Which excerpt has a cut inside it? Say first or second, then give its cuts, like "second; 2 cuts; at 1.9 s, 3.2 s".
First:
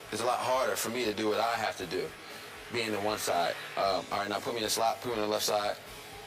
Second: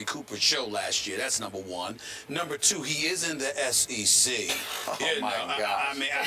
second; 1 cut; at 1.9 s